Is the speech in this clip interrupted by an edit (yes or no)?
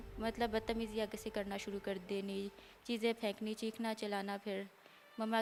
no